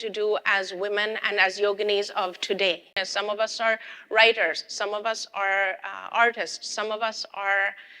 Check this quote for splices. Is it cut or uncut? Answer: cut